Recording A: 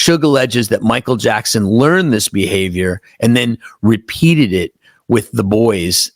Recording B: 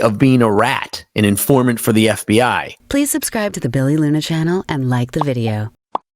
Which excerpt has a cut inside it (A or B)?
B